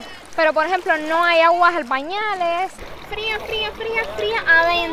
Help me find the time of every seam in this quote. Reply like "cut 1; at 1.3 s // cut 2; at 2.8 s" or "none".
cut 1; at 2.8 s